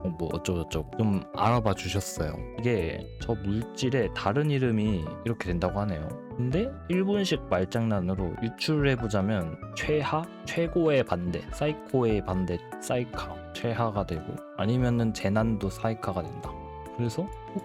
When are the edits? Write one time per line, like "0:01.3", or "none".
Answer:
0:02.4
0:05.2